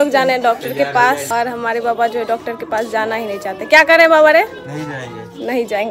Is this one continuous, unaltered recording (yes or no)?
yes